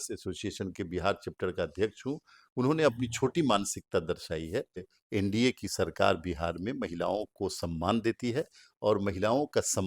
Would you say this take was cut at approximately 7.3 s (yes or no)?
no